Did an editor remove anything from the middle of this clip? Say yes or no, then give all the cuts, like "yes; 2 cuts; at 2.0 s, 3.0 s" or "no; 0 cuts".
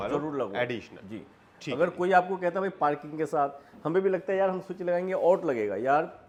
no; 0 cuts